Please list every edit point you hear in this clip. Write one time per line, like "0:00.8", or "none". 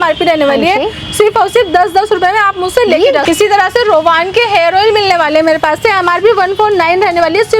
none